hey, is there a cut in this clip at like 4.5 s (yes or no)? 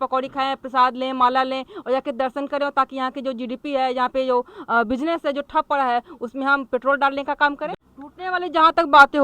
no